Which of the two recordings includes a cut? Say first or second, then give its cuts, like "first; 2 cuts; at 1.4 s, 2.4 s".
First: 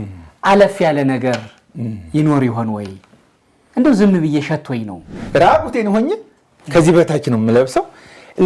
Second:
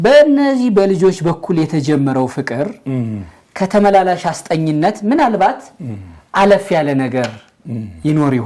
first; 1 cut; at 5.2 s